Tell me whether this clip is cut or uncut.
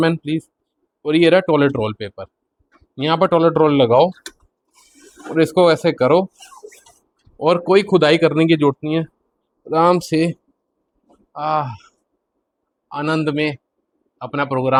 uncut